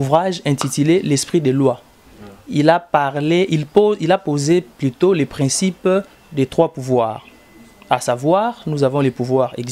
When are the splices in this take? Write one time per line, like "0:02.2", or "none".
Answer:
none